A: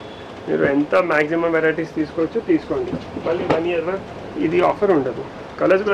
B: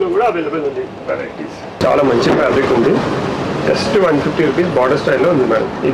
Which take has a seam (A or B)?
B